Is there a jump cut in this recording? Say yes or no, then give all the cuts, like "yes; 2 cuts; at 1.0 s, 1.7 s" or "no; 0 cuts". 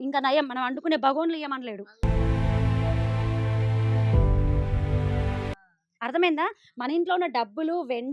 no; 0 cuts